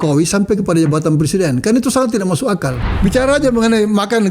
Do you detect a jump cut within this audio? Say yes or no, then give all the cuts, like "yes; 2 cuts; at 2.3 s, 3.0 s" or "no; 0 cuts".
yes; 1 cut; at 2.9 s